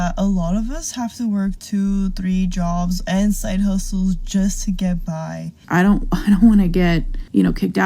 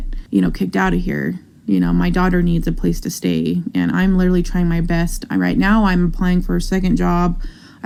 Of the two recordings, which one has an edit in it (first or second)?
first